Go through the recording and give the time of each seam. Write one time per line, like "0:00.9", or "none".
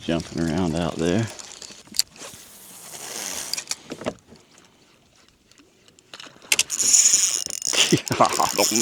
0:01.8
0:04.4